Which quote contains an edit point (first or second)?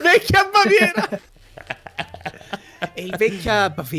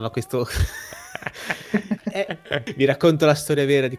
second